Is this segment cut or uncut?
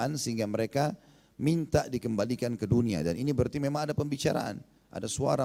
uncut